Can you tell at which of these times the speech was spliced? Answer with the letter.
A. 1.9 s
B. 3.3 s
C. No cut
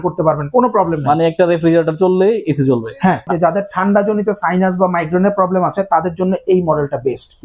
B